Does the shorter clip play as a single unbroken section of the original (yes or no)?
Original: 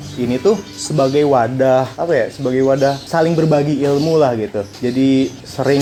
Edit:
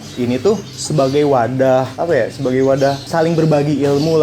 yes